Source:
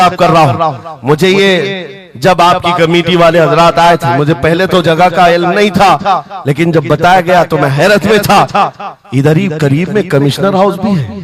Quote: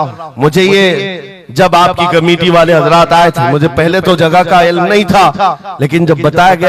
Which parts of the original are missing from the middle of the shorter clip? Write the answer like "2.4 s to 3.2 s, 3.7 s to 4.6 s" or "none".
none

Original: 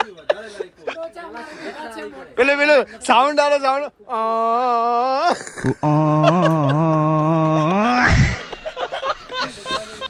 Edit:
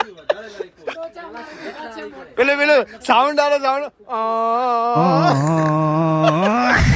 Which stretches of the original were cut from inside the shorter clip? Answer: 5.2 s to 6.5 s

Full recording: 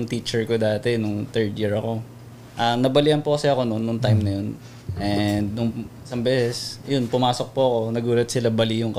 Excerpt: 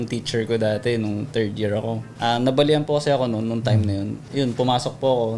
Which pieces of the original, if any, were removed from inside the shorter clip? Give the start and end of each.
2.1 s to 2.4 s, 4.6 s to 6.7 s

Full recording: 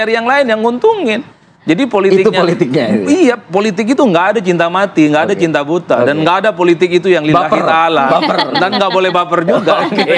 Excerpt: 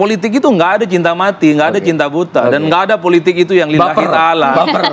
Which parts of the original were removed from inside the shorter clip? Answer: none

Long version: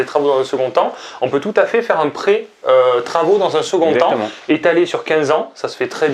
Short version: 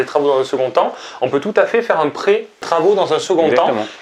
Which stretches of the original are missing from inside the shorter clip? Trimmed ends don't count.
2.6 s to 3.0 s

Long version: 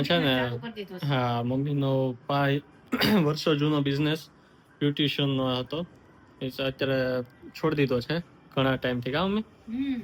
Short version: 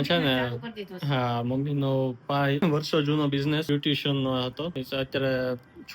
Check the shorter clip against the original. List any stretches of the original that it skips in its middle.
2.6 s to 3.2 s, 4.2 s to 4.8 s, 5.9 s to 6.4 s

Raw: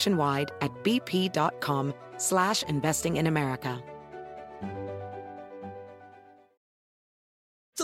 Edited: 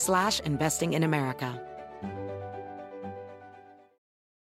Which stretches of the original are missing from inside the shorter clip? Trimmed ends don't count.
3.8 s to 4.1 s

